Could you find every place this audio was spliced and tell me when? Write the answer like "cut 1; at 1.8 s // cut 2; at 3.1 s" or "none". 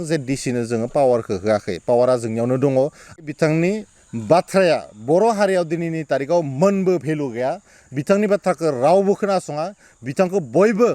cut 1; at 3.0 s